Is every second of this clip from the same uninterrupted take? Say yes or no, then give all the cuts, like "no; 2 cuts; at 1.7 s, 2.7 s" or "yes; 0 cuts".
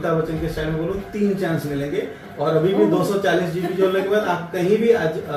yes; 0 cuts